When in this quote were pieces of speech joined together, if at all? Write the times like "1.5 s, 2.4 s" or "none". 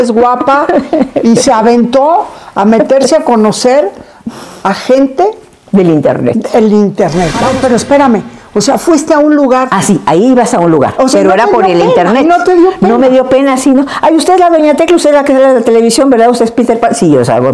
7.4 s